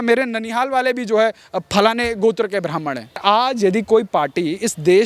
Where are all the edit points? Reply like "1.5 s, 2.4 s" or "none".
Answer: 3.2 s

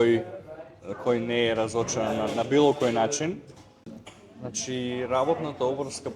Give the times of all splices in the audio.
3.9 s

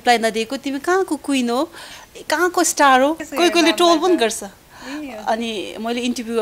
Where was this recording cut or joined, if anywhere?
3.2 s

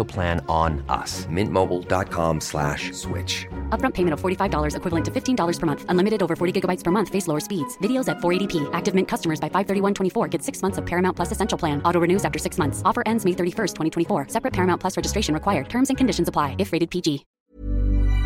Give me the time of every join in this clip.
17.3 s

